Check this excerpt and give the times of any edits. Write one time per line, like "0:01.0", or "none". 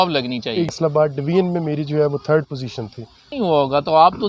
0:00.7
0:03.2